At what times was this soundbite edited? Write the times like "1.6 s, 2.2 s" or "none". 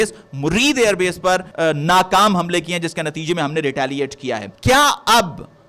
1.5 s, 4.5 s